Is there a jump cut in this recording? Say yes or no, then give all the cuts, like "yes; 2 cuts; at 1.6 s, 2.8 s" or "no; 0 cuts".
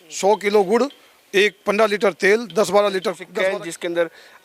yes; 1 cut; at 3.2 s